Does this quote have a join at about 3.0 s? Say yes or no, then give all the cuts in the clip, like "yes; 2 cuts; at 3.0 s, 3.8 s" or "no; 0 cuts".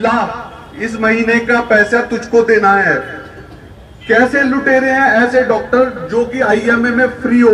no; 0 cuts